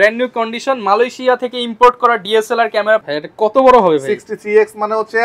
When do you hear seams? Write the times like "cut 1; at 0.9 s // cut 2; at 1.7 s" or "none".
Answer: cut 1; at 3.0 s